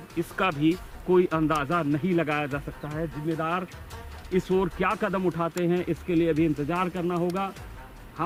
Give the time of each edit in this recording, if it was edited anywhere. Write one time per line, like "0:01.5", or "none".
none